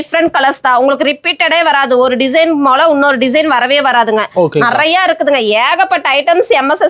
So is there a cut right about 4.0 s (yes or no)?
no